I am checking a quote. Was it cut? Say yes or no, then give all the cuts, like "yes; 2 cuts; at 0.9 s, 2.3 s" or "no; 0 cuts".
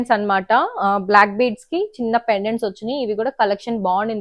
no; 0 cuts